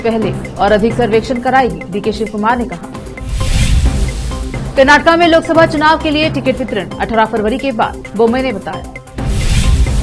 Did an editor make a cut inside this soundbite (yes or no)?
no